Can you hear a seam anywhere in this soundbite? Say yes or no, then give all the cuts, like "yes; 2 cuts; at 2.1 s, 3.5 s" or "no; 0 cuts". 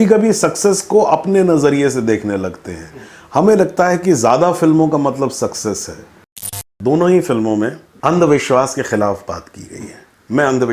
yes; 2 cuts; at 6.6 s, 7.8 s